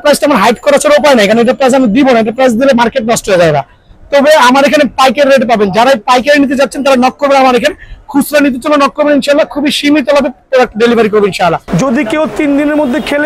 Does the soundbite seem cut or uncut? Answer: cut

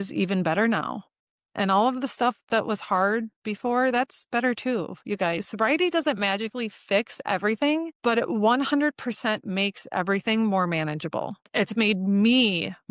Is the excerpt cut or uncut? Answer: uncut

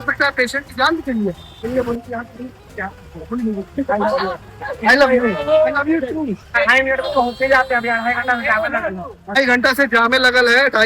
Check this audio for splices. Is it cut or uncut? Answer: cut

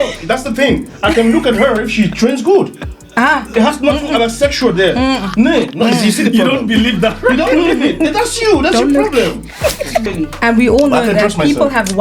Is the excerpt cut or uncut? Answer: cut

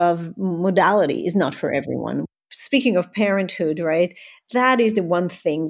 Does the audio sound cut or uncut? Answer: cut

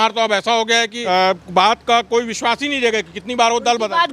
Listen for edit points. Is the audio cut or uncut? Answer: cut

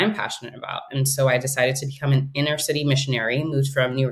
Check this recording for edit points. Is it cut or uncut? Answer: uncut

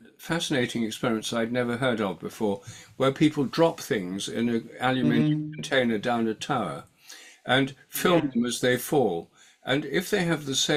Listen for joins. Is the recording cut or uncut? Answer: uncut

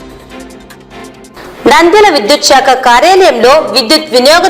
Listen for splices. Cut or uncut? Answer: cut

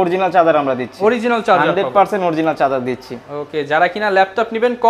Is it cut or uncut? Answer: uncut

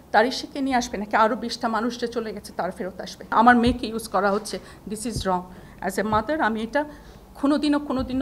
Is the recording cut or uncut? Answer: cut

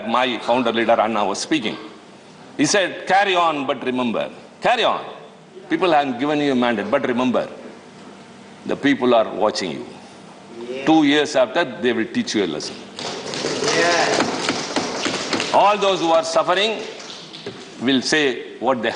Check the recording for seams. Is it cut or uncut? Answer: uncut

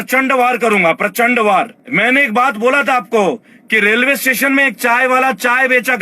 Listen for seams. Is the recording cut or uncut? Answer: cut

